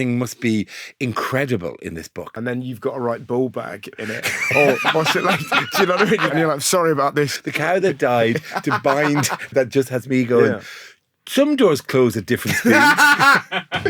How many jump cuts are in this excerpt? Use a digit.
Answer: 4